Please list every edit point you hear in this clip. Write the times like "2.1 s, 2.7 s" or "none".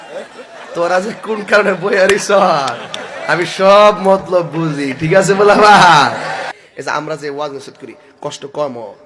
6.5 s